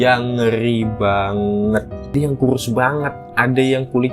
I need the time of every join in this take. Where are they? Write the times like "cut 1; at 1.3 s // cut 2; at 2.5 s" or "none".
cut 1; at 2.1 s